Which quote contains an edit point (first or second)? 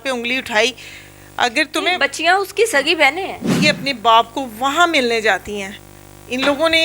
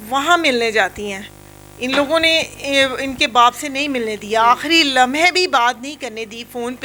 first